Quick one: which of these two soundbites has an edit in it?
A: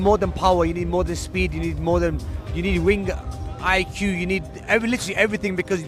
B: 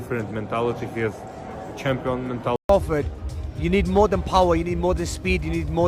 B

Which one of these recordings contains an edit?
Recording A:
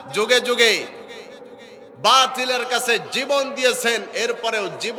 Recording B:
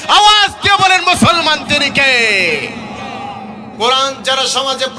B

